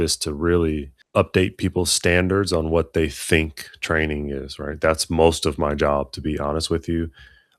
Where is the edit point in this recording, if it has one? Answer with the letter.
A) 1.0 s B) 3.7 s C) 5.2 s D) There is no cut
A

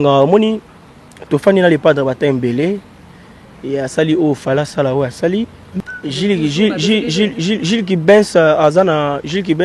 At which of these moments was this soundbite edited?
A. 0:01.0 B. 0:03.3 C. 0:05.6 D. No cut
C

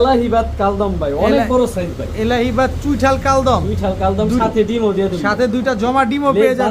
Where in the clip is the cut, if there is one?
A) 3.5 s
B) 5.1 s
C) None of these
C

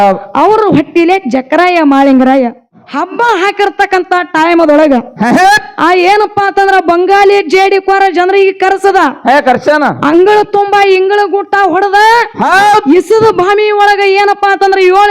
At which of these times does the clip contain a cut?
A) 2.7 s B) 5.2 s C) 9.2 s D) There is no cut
A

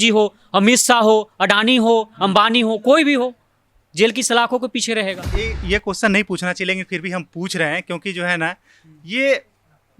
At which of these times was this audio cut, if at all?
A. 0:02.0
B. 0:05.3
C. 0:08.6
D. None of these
B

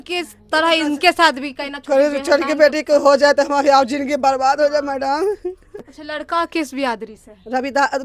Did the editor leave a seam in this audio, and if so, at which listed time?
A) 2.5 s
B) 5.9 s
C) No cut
B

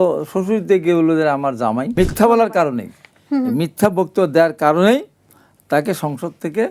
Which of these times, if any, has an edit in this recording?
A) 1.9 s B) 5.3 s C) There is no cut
A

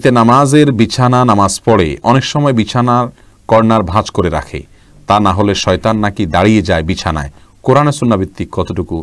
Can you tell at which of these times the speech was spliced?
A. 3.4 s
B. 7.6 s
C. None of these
C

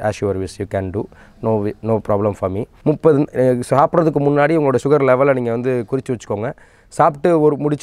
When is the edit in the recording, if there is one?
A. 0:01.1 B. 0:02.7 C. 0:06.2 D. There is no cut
B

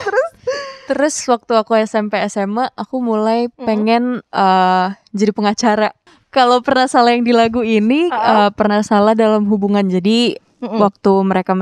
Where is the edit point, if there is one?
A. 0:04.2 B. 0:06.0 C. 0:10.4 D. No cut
B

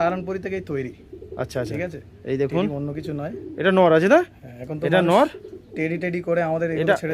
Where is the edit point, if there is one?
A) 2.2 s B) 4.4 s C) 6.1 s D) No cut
D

